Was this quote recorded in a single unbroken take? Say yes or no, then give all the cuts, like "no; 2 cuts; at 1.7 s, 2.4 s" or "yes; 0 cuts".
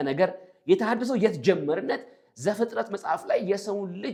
yes; 0 cuts